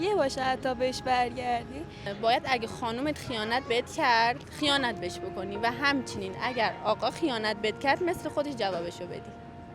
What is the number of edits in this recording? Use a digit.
1